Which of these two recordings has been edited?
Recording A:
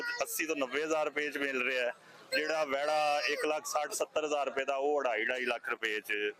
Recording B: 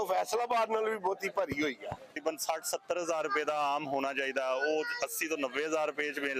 B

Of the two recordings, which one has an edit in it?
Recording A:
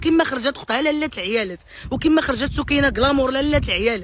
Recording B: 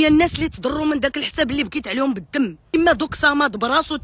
B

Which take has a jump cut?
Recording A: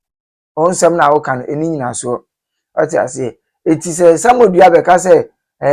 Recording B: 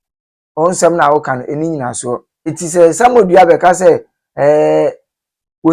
B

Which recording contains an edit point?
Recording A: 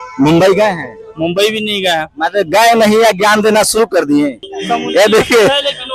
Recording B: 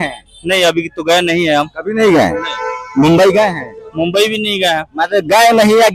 A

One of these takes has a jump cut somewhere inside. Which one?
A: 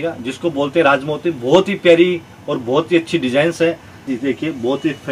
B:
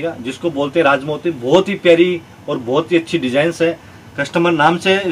A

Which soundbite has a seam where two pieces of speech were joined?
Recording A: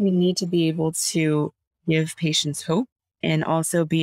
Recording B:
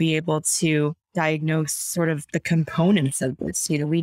B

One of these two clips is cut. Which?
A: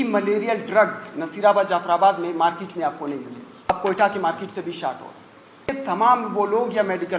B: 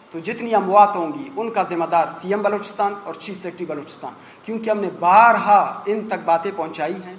A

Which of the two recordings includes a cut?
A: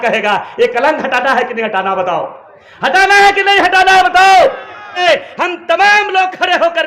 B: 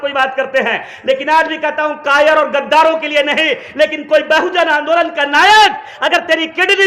A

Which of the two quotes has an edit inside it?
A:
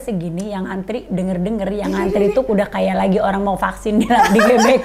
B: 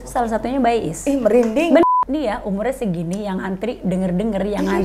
B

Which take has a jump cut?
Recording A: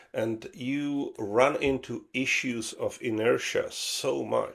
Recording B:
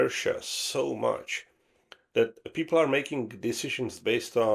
B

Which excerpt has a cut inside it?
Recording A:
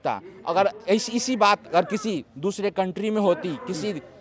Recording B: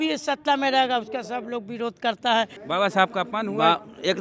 B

